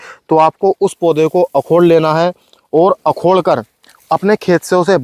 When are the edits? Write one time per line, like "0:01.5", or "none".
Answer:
none